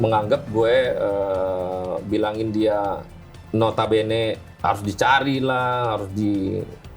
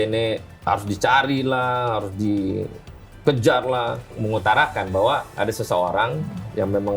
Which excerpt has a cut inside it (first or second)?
second